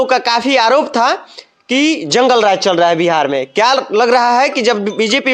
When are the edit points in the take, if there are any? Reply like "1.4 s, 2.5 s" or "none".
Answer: none